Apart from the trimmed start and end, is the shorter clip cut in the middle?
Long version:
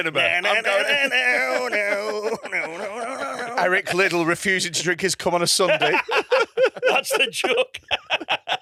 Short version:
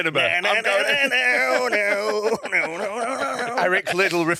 no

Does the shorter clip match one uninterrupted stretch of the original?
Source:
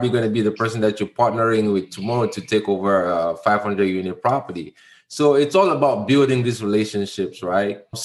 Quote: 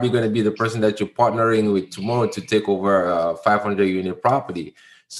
yes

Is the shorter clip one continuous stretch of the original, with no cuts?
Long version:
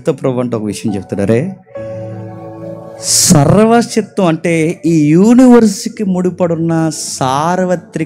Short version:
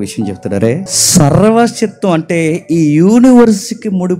no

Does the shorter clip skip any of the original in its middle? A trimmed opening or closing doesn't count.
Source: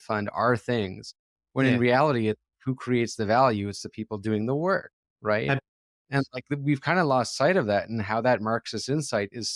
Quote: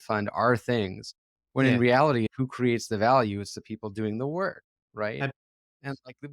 yes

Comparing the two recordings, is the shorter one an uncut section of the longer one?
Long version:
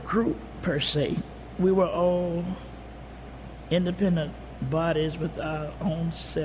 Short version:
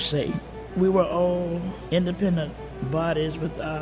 no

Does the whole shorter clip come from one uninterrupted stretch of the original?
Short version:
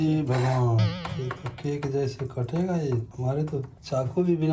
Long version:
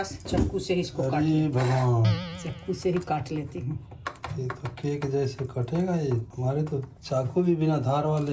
no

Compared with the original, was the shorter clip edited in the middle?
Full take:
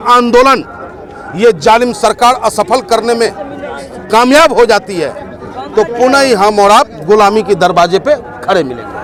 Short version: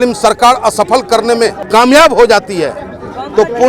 yes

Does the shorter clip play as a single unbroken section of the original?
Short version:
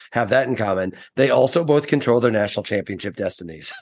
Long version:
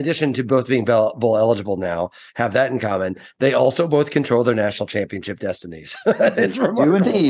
yes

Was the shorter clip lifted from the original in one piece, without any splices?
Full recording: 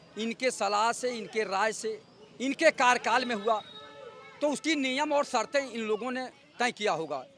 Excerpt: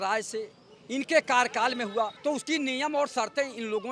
no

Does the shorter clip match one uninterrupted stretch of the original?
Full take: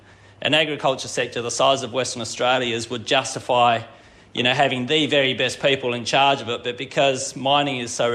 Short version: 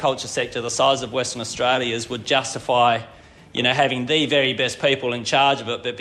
yes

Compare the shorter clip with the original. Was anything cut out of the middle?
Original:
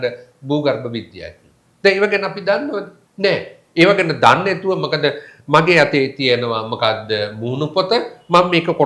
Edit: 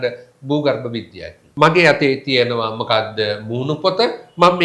yes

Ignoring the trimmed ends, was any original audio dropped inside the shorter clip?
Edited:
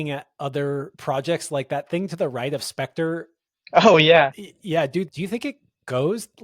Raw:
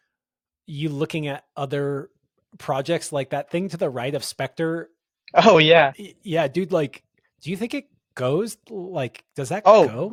yes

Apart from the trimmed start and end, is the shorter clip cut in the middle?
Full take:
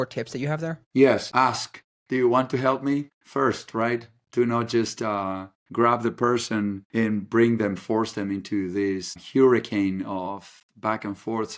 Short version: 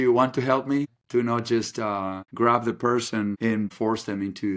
yes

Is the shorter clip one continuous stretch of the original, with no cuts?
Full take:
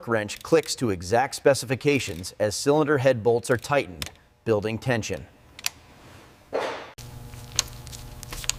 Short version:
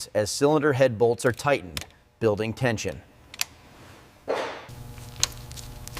no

